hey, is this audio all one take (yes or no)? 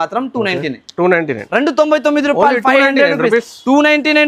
yes